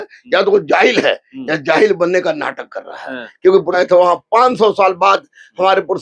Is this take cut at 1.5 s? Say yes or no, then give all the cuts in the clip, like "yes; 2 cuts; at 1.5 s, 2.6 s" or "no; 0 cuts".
no; 1 cut; at 3.8 s